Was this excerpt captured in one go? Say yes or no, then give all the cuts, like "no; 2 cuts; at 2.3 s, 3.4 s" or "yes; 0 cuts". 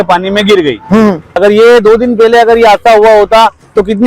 no; 1 cut; at 1.4 s